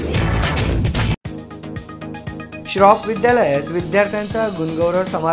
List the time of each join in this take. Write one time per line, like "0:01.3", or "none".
0:02.1